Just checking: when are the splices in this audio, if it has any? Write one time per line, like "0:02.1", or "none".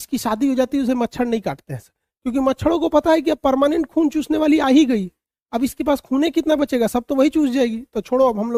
none